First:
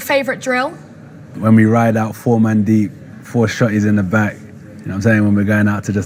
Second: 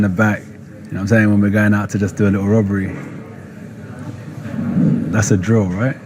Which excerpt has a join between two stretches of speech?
second; 1 cut; at 3.3 s

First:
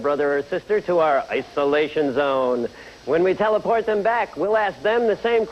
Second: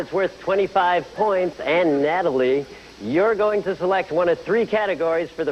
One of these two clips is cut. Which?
first; 1 cut; at 4.3 s

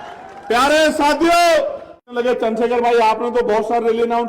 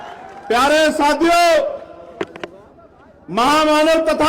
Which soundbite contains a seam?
first; 1 cut; at 2.0 s

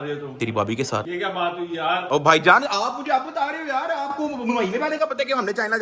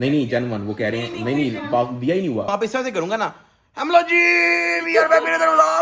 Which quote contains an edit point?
second; 1 cut; at 2.5 s

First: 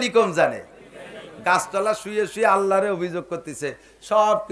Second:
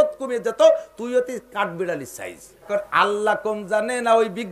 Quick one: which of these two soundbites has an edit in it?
second; 1 cut; at 2.7 s

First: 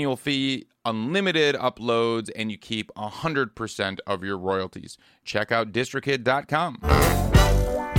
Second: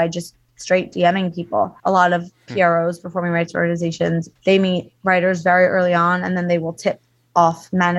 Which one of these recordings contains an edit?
second; 2 cuts; at 1.8 s, 4.3 s

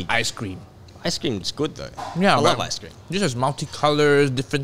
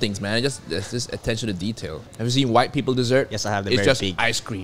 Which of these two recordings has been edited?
second; 1 cut; at 2.1 s

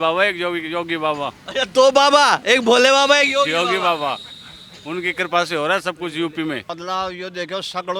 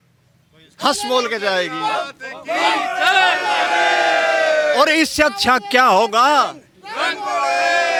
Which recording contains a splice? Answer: first; 1 cut; at 6.7 s

